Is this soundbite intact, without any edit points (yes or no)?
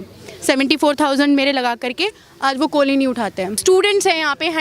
no